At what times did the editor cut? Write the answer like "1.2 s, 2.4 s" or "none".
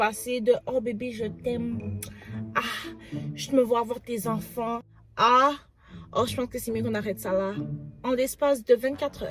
none